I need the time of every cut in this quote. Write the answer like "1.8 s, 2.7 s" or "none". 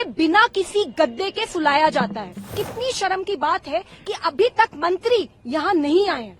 2.6 s